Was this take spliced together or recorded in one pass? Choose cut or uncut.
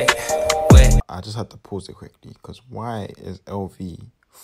cut